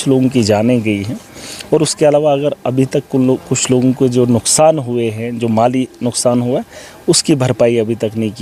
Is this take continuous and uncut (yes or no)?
yes